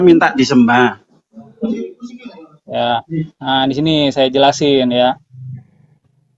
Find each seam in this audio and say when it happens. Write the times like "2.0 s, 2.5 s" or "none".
none